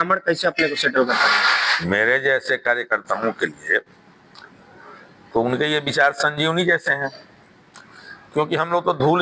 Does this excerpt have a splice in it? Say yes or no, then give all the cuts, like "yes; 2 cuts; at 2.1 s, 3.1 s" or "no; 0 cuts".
yes; 1 cut; at 1.7 s